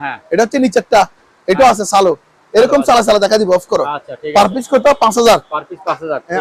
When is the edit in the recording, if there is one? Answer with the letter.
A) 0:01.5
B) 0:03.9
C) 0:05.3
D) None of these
D